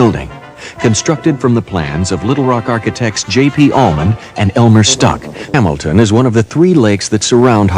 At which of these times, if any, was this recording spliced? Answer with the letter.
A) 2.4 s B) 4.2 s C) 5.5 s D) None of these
C